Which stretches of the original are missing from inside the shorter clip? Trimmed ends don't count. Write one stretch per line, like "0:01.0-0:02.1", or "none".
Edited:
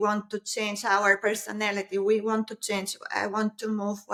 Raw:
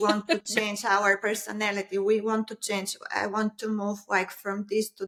none